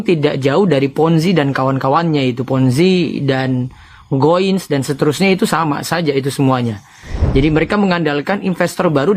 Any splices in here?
no; 0 cuts

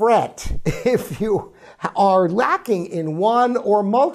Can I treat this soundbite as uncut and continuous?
yes; 0 cuts

